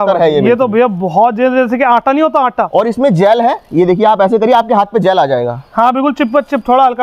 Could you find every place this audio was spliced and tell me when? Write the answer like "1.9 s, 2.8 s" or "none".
none